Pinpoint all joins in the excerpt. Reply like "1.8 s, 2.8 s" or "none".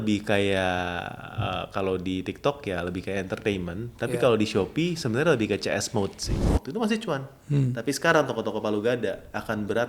6.4 s